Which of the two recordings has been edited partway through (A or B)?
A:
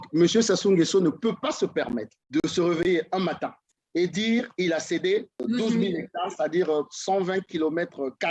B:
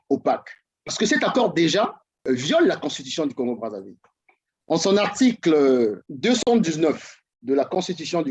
B